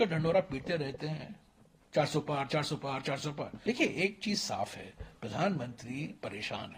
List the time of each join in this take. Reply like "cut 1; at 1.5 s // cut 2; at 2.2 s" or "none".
cut 1; at 3.6 s